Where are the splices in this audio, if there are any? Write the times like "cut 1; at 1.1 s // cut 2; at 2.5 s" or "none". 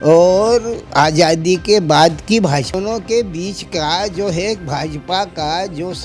cut 1; at 2.7 s